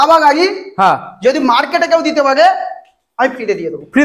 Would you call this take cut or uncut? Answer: uncut